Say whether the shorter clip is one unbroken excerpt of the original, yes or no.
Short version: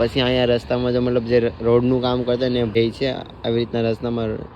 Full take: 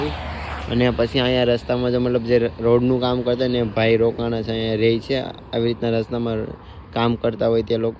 no